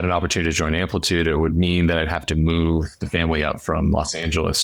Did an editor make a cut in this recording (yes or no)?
no